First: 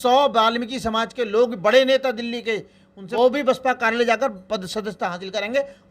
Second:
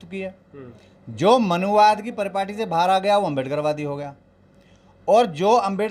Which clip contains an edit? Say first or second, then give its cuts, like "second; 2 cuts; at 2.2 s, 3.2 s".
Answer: first; 1 cut; at 3.0 s